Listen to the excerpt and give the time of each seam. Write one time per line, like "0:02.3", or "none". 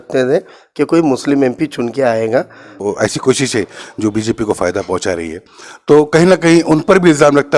0:02.8